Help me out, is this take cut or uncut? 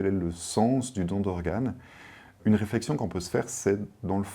cut